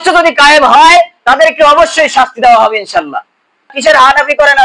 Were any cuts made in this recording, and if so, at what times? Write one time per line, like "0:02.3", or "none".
0:03.7